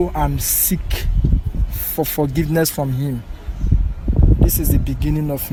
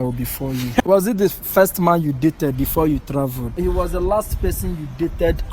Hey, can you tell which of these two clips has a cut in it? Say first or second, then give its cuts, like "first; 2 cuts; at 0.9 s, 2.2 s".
second; 2 cuts; at 0.8 s, 3.6 s